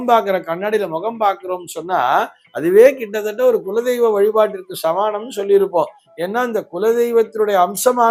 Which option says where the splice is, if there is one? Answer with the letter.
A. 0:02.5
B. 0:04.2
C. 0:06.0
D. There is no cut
D